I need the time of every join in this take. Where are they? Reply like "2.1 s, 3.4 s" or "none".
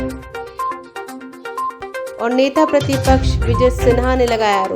1.1 s